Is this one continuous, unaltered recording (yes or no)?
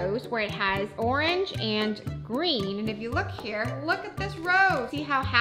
no